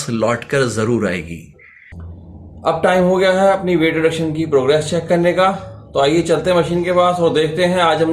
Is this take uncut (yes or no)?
no